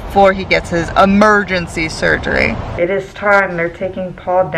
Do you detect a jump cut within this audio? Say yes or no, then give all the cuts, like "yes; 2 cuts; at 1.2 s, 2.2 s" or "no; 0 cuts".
yes; 1 cut; at 2.7 s